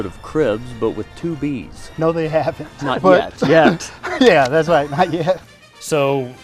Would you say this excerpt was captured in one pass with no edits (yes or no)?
no